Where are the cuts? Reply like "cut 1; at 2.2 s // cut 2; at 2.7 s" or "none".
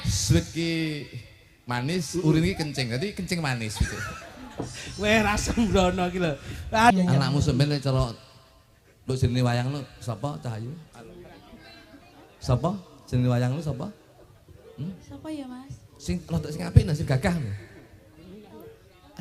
cut 1; at 6.9 s

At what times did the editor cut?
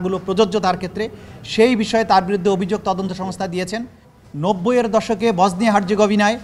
cut 1; at 4.1 s

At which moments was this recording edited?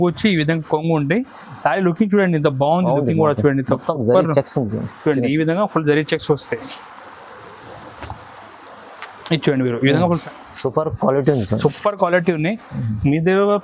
cut 1; at 10.2 s

